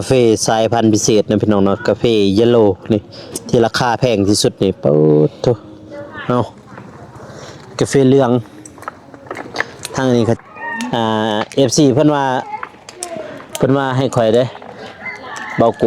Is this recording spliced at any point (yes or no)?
yes